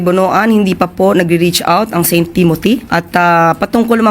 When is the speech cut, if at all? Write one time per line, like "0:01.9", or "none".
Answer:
0:02.9